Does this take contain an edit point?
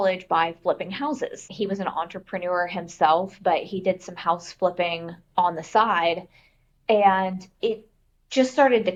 no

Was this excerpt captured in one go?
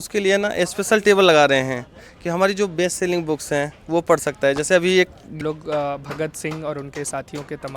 no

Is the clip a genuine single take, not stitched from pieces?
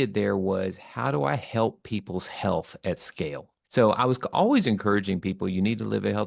yes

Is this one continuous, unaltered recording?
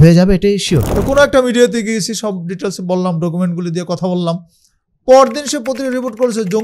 no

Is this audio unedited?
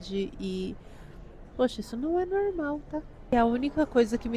no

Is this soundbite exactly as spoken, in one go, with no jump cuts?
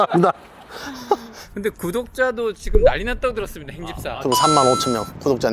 yes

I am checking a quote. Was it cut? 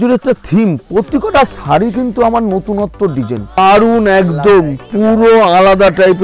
yes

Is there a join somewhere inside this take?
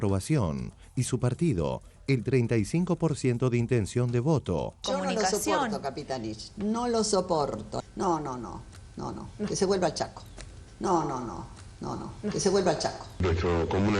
yes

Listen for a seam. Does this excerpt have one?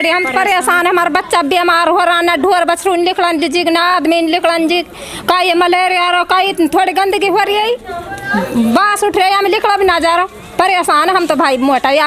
no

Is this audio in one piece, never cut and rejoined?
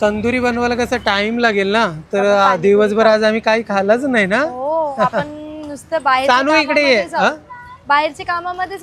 yes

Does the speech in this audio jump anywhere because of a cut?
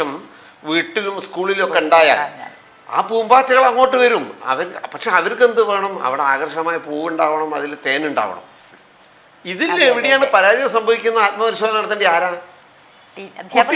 no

